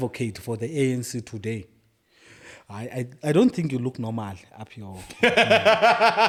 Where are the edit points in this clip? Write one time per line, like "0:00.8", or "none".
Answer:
none